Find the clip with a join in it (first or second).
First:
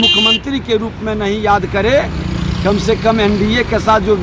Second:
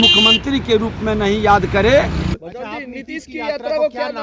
second